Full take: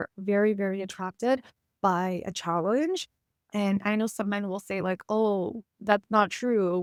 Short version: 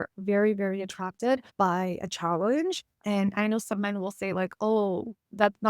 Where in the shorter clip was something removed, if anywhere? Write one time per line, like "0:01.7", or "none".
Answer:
0:01.5
0:02.9